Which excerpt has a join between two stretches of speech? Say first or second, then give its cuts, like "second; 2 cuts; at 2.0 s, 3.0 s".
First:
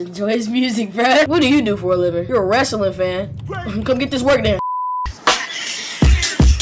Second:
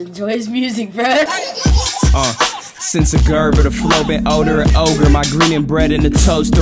second; 1 cut; at 1.3 s